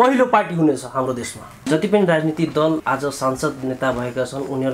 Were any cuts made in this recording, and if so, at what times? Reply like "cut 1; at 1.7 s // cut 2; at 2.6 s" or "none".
cut 1; at 1.7 s // cut 2; at 2.8 s